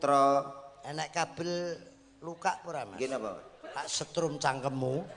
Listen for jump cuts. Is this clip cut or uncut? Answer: uncut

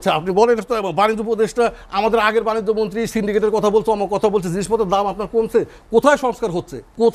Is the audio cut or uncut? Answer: uncut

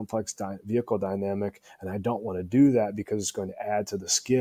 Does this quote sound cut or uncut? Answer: uncut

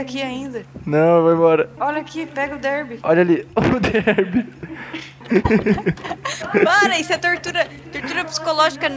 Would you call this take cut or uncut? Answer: cut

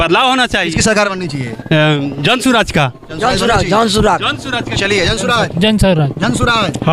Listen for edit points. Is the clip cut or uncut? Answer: uncut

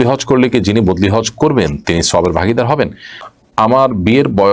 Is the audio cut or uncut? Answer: cut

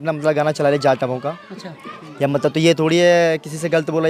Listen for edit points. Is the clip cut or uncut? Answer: uncut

